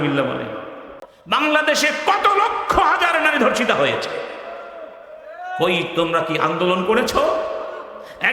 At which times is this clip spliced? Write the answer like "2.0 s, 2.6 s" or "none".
1.1 s